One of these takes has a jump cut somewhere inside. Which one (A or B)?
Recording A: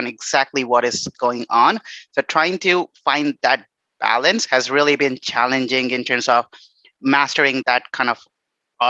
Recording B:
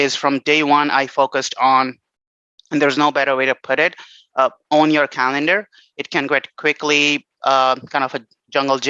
A